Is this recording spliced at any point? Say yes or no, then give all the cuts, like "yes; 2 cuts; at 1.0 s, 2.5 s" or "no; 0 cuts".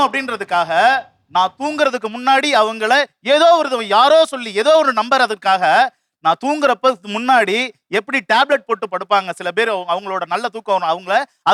no; 0 cuts